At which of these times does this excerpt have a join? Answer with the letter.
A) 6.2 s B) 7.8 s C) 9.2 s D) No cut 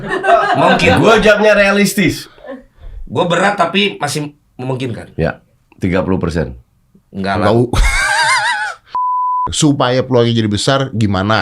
C